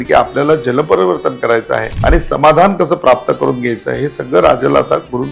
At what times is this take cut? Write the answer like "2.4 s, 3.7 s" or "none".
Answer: 1.9 s